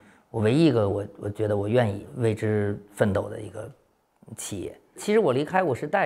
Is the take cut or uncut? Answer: cut